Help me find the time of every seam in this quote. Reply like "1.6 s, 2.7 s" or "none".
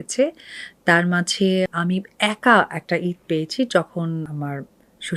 1.8 s, 4.3 s